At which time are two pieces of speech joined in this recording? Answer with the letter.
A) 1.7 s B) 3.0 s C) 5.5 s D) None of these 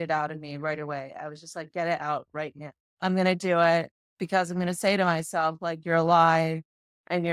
B